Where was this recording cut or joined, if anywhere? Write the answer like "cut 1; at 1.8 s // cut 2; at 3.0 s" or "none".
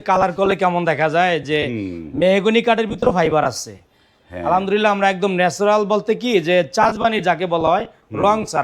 none